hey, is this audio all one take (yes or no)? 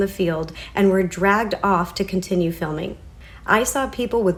yes